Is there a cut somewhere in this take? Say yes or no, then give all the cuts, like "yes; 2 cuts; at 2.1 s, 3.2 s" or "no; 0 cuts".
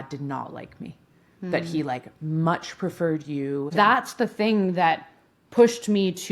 yes; 1 cut; at 3.7 s